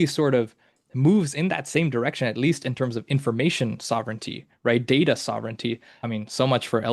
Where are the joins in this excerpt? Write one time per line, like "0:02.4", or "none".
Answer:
0:05.9